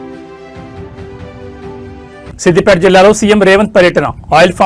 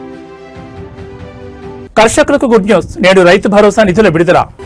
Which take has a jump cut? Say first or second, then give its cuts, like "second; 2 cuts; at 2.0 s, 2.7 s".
first; 1 cut; at 1.8 s